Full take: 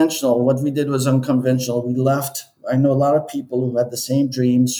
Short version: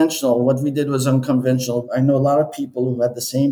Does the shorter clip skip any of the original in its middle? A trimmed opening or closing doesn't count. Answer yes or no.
yes